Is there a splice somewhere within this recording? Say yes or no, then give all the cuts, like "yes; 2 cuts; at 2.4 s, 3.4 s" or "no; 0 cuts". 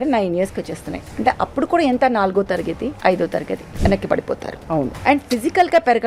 yes; 3 cuts; at 3.0 s, 3.6 s, 5.0 s